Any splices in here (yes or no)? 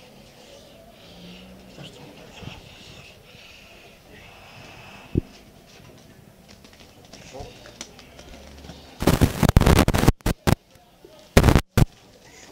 no